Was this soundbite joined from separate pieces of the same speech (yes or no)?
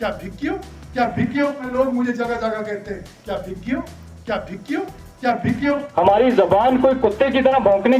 yes